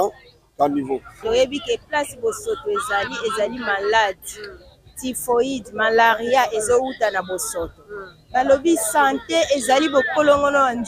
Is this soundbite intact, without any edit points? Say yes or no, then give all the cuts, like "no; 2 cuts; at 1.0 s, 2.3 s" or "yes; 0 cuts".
no; 1 cut; at 1.1 s